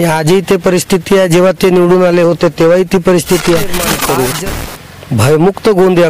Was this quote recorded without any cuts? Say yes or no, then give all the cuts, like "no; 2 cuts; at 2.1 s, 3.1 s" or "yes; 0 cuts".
no; 1 cut; at 3.9 s